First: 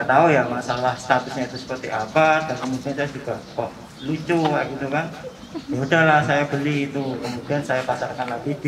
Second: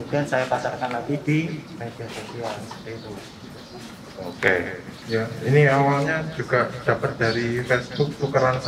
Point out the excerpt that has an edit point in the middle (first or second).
second